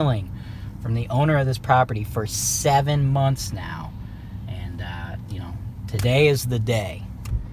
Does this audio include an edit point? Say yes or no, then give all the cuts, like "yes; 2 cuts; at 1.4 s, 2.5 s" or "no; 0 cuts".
no; 0 cuts